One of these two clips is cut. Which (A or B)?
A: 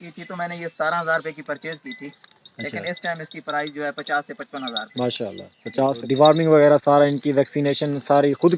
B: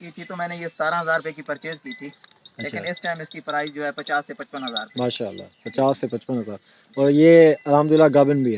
A